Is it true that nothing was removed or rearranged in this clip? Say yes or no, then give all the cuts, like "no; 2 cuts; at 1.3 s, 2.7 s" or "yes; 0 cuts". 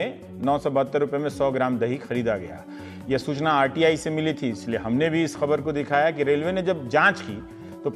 yes; 0 cuts